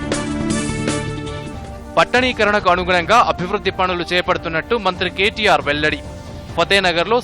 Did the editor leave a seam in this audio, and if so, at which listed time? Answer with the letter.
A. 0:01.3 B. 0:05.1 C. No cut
A